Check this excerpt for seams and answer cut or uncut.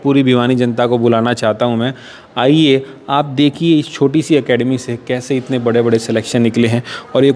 uncut